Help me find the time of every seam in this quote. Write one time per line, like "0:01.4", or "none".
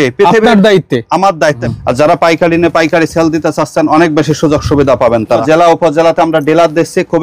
0:01.6
0:05.4